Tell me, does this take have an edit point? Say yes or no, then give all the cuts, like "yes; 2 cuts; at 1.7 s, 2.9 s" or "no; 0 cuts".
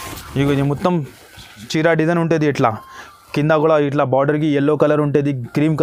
no; 0 cuts